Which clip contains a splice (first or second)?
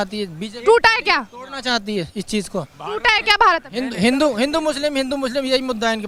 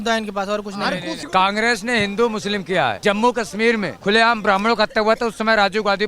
second